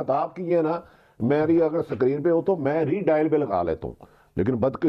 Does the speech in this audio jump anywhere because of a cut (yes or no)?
no